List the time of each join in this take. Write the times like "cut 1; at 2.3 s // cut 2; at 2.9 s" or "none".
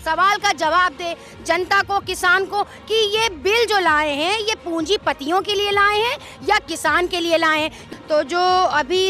cut 1; at 7.9 s